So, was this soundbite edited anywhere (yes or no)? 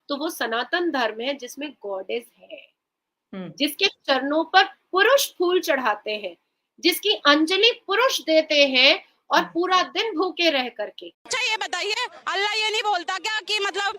yes